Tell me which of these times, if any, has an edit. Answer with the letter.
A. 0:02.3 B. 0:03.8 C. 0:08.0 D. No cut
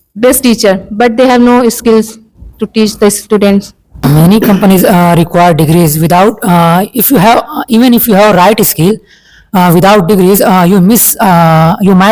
B